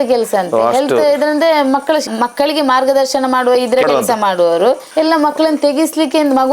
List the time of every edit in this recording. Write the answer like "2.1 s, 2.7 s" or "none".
2.1 s, 4.8 s